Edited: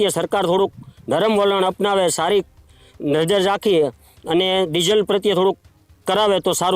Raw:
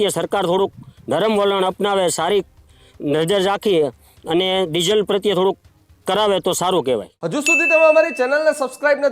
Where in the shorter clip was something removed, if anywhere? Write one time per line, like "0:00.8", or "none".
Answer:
none